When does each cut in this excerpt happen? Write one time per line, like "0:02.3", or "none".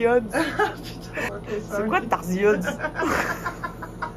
0:01.3